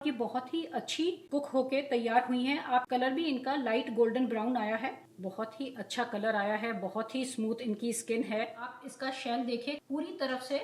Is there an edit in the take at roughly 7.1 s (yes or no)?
no